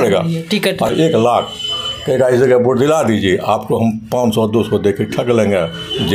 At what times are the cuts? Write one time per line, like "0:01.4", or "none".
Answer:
0:00.9